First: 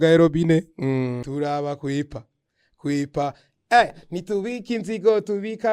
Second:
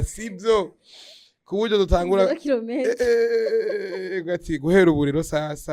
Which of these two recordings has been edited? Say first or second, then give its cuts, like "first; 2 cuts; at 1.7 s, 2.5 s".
first; 1 cut; at 1.2 s